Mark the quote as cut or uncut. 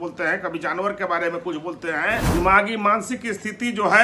cut